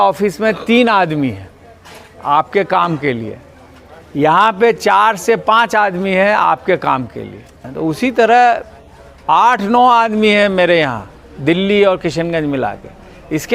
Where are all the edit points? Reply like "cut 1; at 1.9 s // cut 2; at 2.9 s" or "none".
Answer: cut 1; at 7.7 s